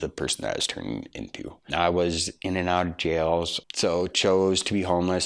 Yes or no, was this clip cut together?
yes